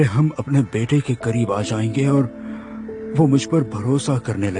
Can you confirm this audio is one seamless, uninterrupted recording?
yes; 0 cuts

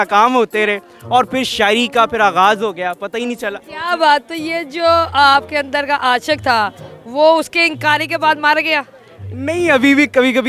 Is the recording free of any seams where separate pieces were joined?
yes; 0 cuts

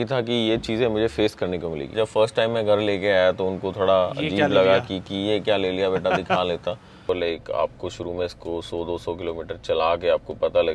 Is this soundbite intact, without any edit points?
no; 2 cuts; at 1.9 s, 7.0 s

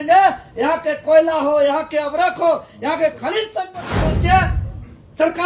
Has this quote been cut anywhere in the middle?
yes; 1 cut; at 3.9 s

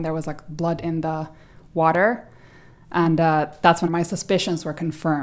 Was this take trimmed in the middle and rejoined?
yes; 1 cut; at 3.9 s

